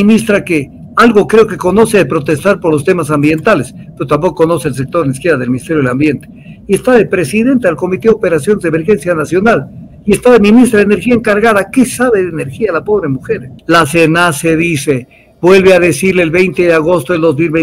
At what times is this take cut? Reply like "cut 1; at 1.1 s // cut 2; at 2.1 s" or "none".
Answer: cut 1; at 13.5 s